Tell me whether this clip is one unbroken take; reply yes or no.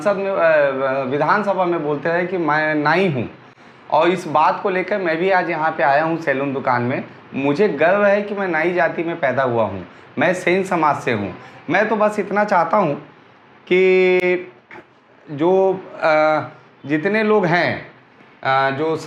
yes